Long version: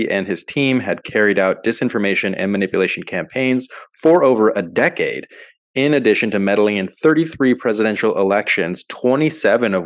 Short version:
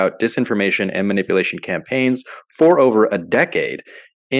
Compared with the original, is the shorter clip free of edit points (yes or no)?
yes